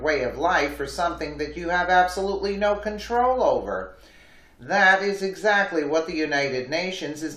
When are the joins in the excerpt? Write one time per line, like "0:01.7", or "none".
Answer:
none